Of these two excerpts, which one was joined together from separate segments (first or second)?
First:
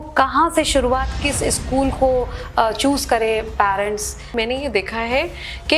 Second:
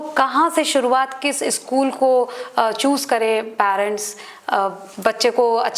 first